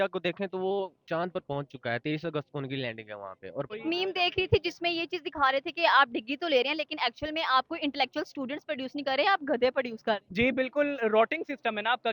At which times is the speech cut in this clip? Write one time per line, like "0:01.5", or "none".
0:03.7

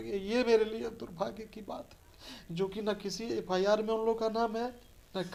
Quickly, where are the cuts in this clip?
none

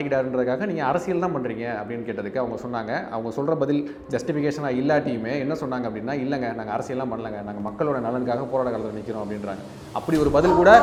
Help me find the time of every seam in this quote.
none

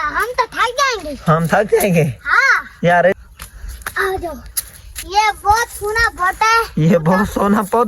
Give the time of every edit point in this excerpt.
0:03.1

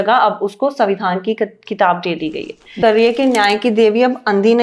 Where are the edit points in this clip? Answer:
0:02.7

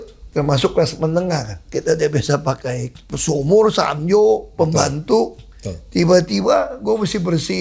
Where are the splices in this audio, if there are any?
0:01.7
0:03.1

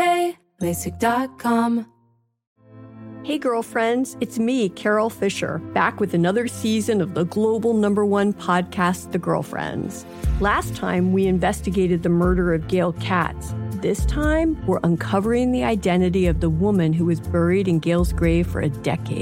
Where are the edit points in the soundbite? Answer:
0:01.9

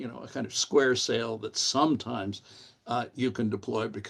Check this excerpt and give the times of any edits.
none

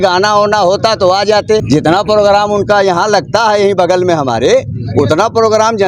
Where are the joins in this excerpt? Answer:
0:01.6

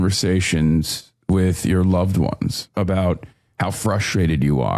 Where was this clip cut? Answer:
none

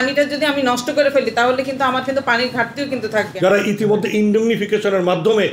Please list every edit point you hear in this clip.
0:03.3

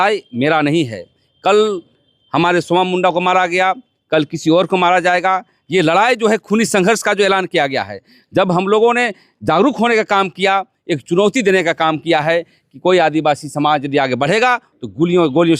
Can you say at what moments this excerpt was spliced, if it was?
none

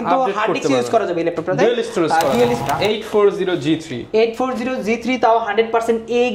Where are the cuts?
0:02.6

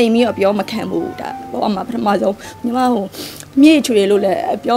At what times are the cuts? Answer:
0:02.5

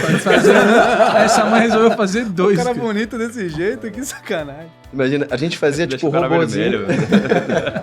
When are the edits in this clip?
none

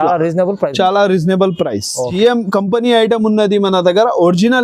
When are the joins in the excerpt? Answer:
none

